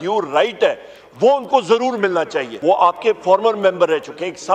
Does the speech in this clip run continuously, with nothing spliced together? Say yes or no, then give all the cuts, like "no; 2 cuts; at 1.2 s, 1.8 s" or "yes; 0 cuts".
no; 1 cut; at 2.5 s